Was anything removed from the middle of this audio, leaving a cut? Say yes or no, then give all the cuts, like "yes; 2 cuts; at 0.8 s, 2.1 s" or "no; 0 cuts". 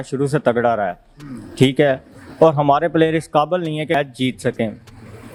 no; 0 cuts